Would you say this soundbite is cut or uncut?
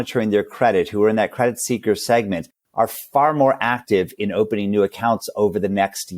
uncut